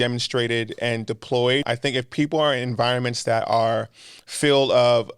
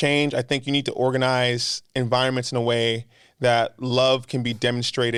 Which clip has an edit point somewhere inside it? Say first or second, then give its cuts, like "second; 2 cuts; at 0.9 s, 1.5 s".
first; 1 cut; at 1.6 s